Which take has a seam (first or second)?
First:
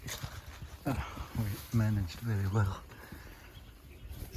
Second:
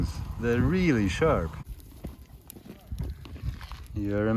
second